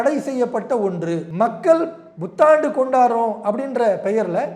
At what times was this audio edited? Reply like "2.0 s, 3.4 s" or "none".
1.3 s